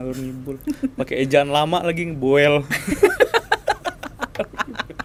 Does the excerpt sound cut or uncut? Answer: uncut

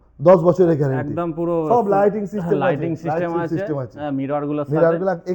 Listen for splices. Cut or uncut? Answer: uncut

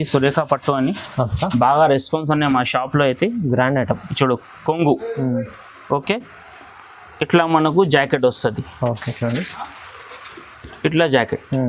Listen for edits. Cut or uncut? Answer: uncut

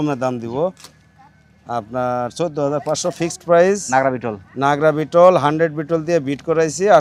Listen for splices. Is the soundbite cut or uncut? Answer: uncut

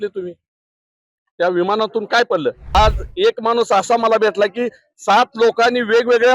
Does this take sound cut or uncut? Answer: cut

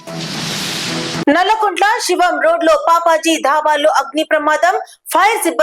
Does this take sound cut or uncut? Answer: uncut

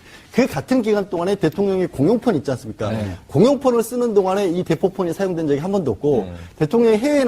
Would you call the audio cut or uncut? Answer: cut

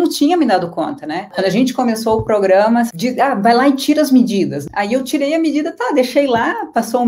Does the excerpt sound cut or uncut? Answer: cut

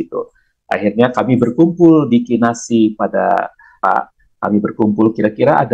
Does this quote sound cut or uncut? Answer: cut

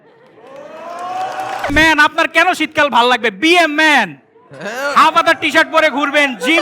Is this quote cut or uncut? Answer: cut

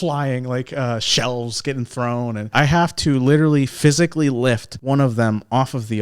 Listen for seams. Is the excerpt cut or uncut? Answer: cut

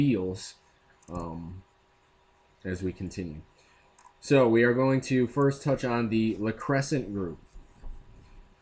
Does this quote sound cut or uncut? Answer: uncut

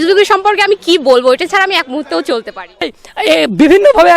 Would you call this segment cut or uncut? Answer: cut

